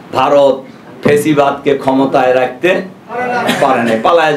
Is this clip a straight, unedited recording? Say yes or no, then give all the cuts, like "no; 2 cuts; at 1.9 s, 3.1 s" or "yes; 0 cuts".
yes; 0 cuts